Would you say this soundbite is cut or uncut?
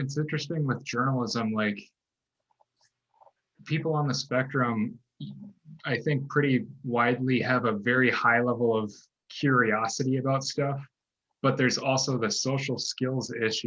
uncut